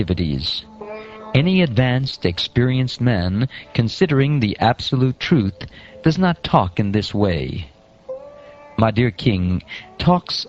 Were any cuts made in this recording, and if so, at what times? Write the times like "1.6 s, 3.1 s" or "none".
none